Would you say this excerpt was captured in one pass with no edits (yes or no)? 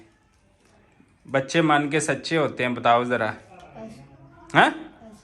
yes